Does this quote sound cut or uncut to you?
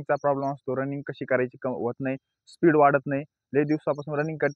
uncut